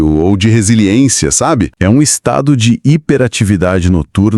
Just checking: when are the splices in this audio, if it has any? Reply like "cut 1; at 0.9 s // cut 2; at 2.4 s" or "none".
cut 1; at 1.7 s